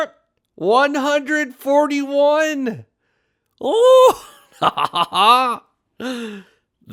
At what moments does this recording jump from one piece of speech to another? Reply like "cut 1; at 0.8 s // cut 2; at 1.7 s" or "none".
none